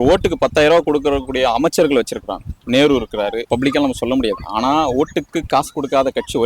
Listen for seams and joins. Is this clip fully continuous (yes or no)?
no